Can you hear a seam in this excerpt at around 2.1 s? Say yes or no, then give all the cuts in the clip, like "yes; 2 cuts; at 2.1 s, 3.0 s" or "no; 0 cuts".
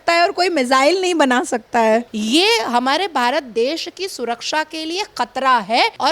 yes; 1 cut; at 2.1 s